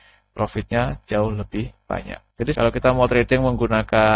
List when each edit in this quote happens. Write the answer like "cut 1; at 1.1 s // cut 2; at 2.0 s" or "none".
cut 1; at 2.4 s

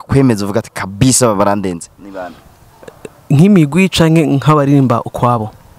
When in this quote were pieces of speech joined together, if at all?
none

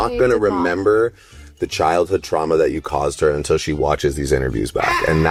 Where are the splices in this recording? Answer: none

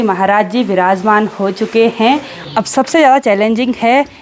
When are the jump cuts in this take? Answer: cut 1; at 2.3 s

